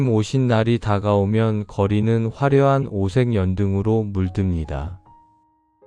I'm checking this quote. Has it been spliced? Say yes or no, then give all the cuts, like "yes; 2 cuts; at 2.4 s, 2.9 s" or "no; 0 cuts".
no; 0 cuts